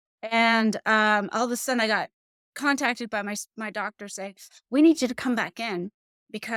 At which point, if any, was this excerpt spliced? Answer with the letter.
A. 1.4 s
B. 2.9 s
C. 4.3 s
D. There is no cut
D